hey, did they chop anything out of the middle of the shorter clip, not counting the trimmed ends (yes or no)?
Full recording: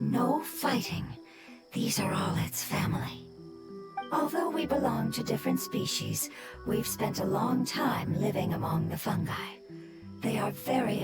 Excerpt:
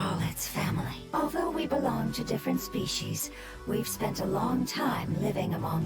yes